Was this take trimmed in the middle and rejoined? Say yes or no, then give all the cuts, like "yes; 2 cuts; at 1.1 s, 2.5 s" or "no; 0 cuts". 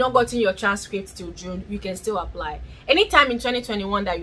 no; 0 cuts